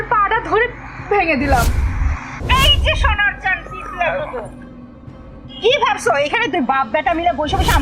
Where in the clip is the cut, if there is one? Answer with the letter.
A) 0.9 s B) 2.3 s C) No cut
B